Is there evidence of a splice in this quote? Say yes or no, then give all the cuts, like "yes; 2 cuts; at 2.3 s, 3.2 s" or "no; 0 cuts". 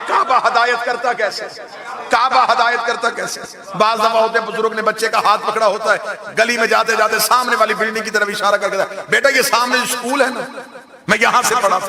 no; 0 cuts